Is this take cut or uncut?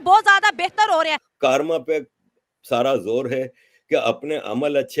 cut